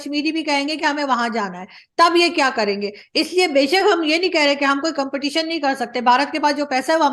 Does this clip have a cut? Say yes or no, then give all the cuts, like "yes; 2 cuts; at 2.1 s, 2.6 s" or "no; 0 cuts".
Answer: no; 0 cuts